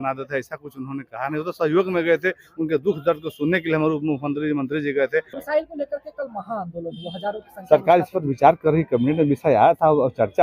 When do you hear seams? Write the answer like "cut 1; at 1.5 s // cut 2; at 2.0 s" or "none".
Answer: cut 1; at 5.4 s